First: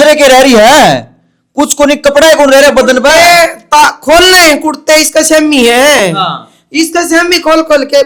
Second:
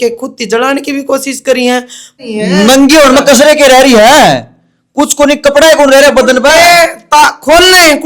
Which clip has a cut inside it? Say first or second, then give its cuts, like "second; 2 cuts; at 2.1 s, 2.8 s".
second; 1 cut; at 2.2 s